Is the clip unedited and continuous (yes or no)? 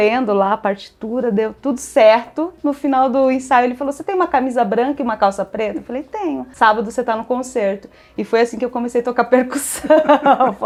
yes